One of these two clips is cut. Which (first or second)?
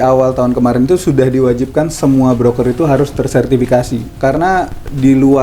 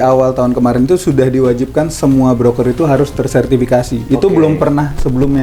first